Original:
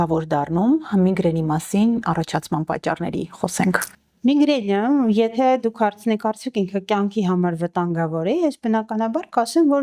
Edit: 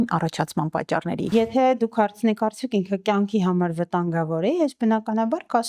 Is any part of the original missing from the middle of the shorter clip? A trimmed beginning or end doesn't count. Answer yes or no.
yes